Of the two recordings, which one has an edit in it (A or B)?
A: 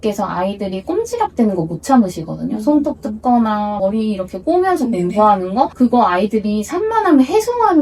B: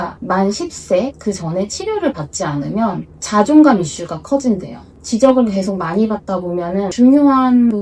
B